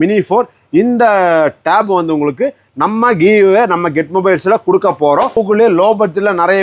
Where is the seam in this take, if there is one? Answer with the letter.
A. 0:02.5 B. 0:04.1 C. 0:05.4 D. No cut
C